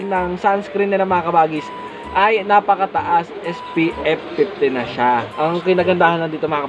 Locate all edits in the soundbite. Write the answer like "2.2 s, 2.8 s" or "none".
5.3 s